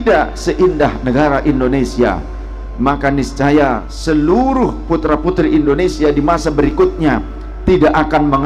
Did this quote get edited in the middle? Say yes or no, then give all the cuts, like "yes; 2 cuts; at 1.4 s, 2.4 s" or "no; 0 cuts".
yes; 1 cut; at 3.9 s